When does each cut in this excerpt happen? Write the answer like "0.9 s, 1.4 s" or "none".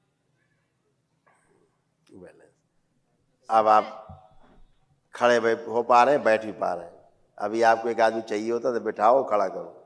none

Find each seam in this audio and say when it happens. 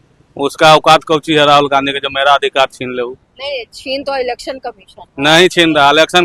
none

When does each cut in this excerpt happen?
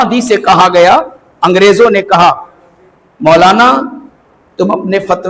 none

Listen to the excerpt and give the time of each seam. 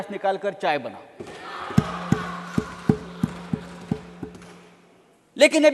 none

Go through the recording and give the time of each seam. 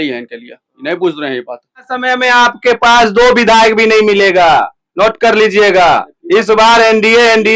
1.8 s

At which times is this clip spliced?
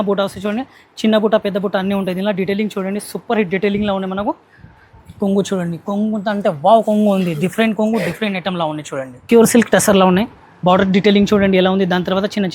9.1 s

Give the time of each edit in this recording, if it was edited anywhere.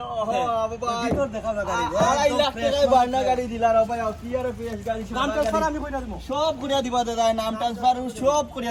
none

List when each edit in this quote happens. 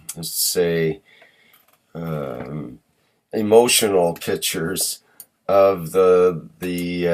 none

